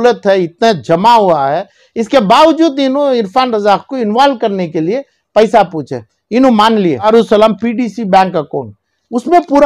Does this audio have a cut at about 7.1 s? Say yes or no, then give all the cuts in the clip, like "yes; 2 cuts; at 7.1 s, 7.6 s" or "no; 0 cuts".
yes; 1 cut; at 7.1 s